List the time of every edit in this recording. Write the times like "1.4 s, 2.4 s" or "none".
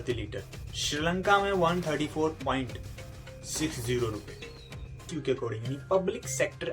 5.1 s